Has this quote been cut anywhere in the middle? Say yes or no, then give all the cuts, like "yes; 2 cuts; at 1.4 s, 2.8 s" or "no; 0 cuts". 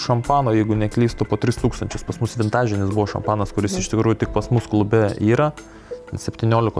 no; 0 cuts